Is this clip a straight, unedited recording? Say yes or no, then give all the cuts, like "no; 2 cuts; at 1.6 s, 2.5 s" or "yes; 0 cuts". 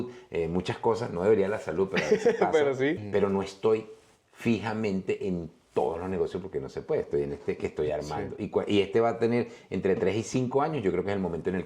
no; 1 cut; at 3.0 s